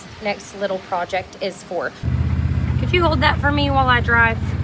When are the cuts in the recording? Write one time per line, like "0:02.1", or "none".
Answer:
0:02.0

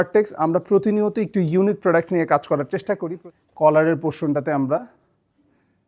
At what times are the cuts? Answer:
0:03.1

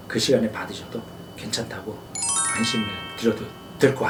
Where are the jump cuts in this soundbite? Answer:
none

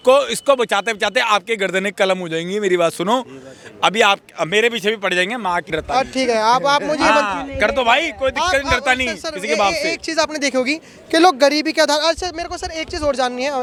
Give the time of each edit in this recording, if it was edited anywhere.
none

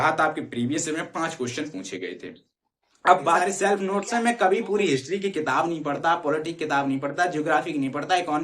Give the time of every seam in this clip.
0:03.3

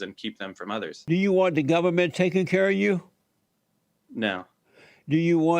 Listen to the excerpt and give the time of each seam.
0:00.9

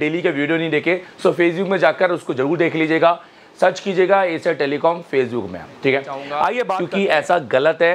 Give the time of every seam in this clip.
0:06.8

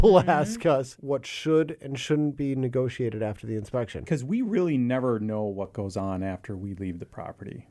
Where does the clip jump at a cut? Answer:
0:01.0
0:04.0

